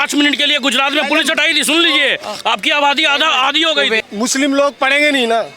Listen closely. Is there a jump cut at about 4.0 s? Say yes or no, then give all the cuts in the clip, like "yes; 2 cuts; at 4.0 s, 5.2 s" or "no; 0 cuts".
yes; 1 cut; at 4.0 s